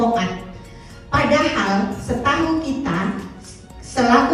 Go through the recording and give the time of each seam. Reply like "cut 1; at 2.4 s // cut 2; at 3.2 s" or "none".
none